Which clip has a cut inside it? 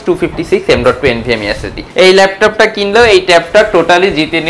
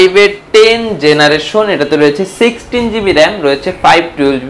first; 1 cut; at 1.8 s

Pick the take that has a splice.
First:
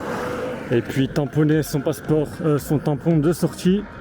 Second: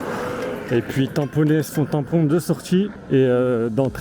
second; 2 cuts; at 1.7 s, 3.0 s

